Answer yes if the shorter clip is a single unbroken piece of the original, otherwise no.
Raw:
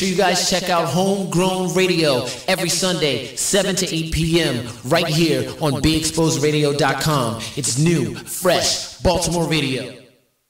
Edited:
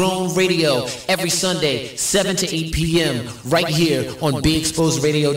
yes